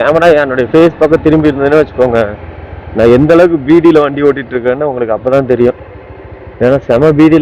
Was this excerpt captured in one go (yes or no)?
yes